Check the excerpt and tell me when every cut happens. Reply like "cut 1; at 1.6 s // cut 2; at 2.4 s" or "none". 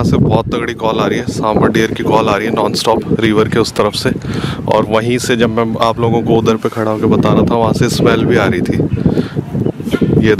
none